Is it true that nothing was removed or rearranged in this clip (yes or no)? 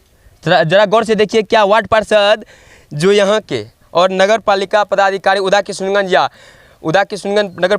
yes